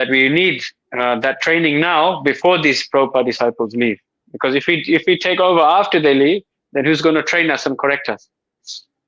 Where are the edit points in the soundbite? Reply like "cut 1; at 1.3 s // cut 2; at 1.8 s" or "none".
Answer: none